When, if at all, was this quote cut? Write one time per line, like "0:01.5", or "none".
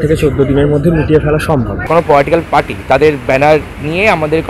0:01.9